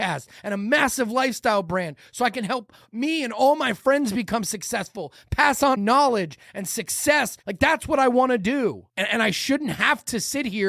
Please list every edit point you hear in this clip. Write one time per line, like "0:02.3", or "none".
0:05.8
0:07.4
0:08.9